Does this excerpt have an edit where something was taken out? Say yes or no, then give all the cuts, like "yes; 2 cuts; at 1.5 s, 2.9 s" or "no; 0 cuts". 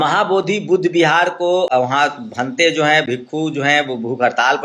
yes; 1 cut; at 1.7 s